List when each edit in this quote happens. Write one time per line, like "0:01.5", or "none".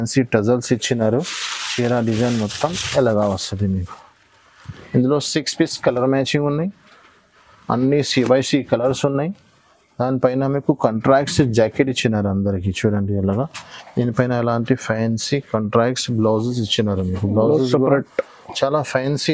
none

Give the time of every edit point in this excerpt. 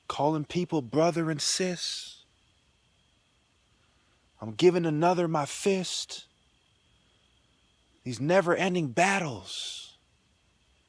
none

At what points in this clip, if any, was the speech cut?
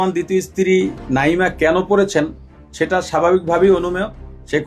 none

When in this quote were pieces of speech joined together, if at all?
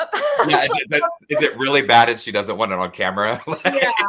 none

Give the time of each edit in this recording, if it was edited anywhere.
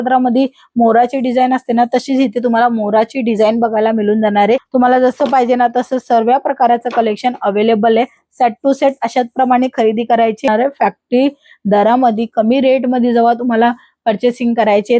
0:04.7
0:10.5

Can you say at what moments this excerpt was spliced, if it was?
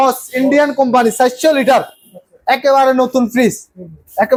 none

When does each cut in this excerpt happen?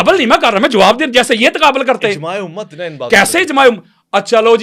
none

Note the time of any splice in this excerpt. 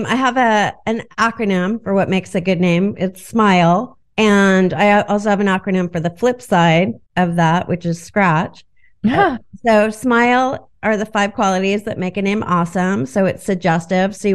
0:04.0
0:07.0

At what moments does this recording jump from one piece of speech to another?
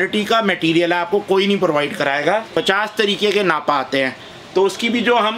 0:02.5

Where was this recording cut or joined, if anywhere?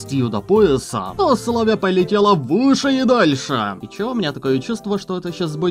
0:01.0
0:03.8

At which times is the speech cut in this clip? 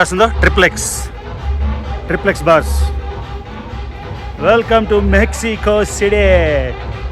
none

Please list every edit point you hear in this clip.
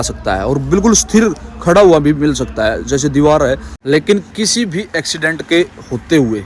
0:03.7

